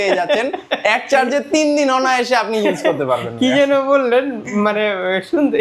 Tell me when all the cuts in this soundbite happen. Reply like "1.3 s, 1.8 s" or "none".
none